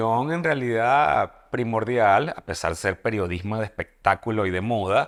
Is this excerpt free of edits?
yes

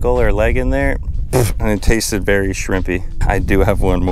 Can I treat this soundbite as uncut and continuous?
yes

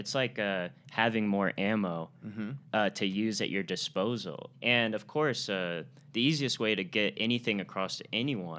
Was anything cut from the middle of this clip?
yes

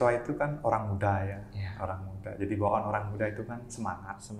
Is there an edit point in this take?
no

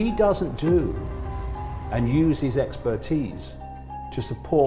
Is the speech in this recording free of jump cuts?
yes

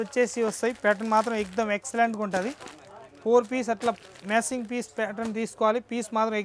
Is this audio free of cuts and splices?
yes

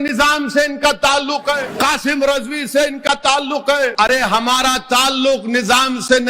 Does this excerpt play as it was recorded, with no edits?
no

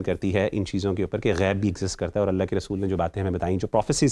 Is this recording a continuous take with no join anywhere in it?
yes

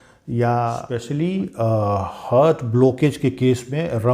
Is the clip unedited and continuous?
no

